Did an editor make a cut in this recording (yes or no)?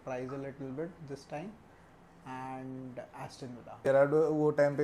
yes